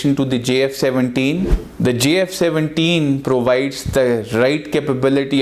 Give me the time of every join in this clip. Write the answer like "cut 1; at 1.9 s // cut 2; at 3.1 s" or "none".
cut 1; at 1.5 s